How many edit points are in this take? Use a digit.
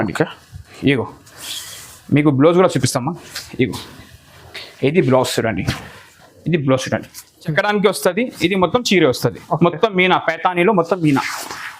1